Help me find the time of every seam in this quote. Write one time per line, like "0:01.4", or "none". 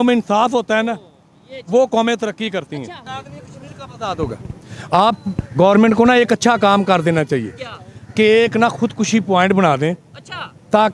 0:03.0